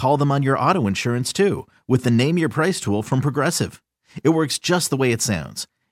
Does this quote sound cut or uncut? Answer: uncut